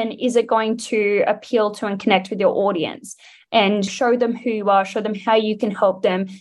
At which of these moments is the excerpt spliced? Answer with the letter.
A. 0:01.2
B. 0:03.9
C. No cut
B